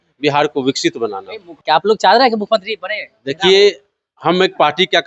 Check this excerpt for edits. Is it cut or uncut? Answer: cut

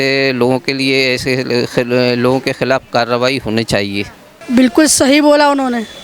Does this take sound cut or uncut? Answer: cut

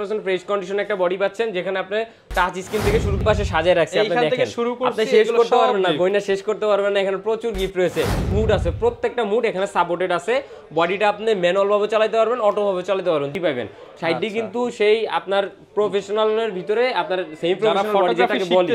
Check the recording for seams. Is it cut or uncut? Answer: cut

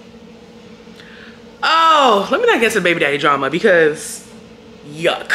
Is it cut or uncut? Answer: uncut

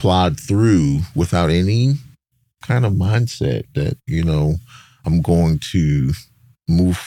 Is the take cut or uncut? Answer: uncut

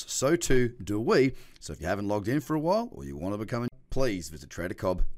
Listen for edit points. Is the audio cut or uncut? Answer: cut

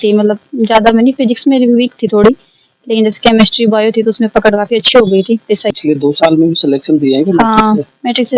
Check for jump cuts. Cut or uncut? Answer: cut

